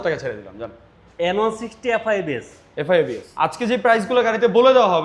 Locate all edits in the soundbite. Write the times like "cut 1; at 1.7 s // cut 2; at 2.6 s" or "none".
cut 1; at 3.5 s